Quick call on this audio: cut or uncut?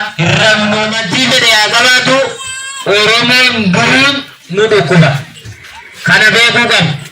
cut